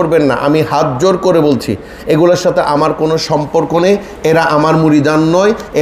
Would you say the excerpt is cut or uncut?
uncut